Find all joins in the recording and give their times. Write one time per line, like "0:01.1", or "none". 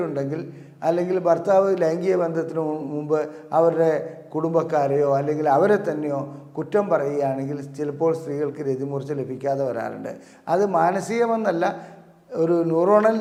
none